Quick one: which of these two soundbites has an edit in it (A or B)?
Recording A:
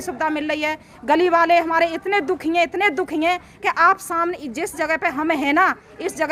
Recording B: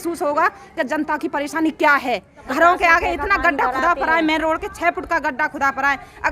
B